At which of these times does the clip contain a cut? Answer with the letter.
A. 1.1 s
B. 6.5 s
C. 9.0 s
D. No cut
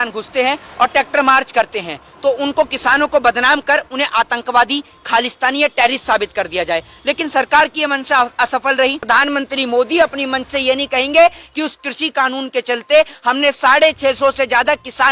C